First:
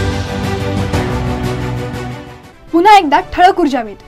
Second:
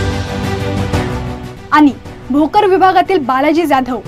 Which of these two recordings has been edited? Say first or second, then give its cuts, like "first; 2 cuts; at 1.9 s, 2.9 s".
second; 1 cut; at 1.1 s